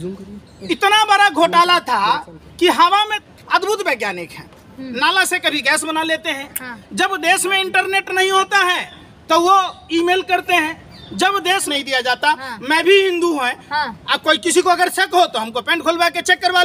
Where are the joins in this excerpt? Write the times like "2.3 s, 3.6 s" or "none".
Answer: 3.2 s, 11.7 s